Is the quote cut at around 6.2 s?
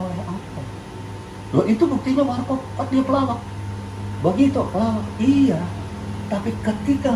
no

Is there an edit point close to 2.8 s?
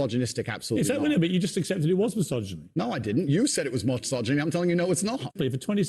no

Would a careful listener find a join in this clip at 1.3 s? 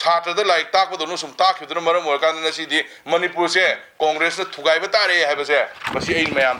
no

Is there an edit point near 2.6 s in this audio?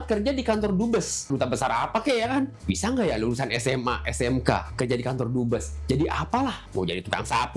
yes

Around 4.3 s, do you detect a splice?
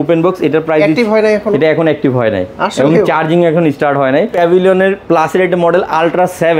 yes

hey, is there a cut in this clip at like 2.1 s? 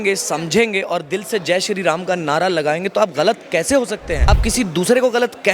no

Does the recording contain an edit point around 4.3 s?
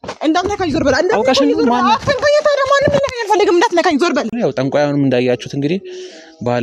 yes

